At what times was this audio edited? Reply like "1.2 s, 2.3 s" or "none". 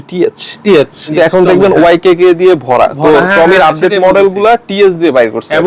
1.1 s